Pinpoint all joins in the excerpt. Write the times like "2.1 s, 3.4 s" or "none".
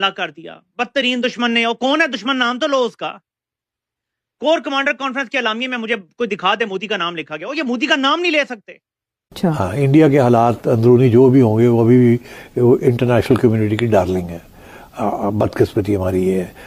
9.4 s